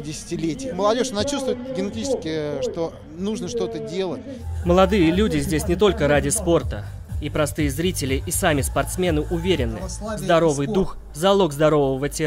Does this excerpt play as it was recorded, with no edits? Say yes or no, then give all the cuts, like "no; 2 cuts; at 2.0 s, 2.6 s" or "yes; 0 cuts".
no; 1 cut; at 6.7 s